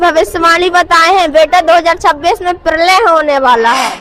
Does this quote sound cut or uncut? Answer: uncut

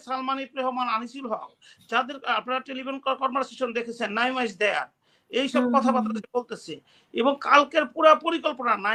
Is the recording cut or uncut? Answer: uncut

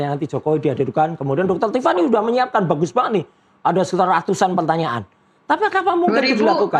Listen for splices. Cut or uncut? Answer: uncut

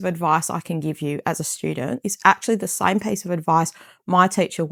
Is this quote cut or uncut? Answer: uncut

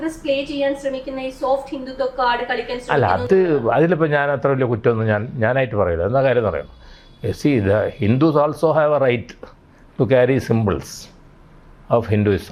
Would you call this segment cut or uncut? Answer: uncut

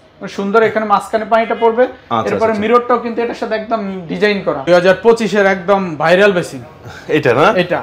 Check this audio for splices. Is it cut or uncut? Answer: cut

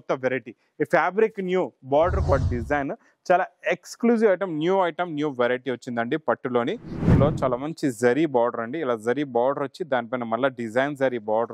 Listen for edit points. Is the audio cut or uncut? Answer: cut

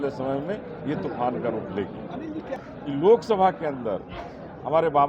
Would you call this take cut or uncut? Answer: cut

